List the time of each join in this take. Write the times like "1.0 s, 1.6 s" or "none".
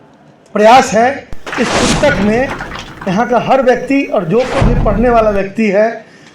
1.4 s